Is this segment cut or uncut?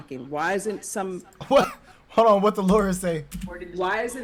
uncut